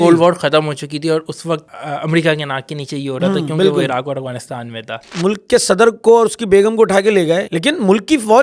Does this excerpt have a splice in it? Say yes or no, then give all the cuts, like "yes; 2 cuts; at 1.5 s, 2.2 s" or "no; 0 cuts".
yes; 3 cuts; at 1.7 s, 5.0 s, 7.5 s